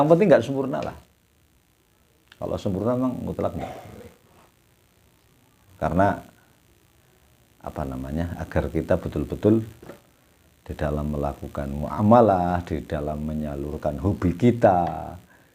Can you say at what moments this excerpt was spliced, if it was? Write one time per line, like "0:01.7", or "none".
0:05.7